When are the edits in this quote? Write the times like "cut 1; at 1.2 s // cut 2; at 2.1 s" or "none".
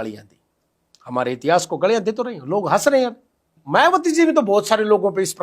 cut 1; at 3.5 s